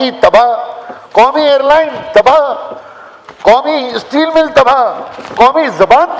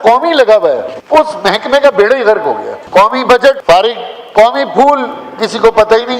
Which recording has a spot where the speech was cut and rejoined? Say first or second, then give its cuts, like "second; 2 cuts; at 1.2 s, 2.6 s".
second; 3 cuts; at 0.9 s, 2.7 s, 3.6 s